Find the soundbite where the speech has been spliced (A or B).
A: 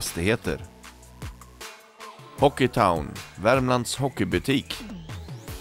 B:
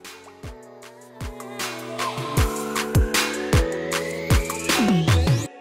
A